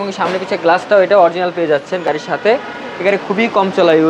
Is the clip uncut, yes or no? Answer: yes